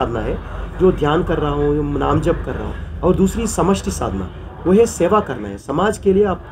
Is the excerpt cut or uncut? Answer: uncut